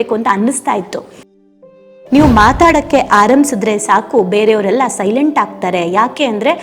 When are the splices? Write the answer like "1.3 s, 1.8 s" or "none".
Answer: 1.4 s